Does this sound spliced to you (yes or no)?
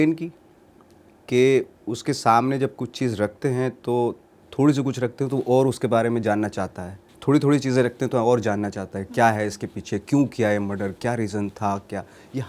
no